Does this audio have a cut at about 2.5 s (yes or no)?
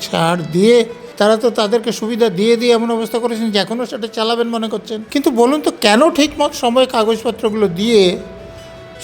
no